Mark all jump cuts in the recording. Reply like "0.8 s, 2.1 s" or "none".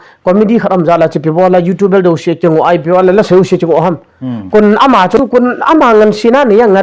5.4 s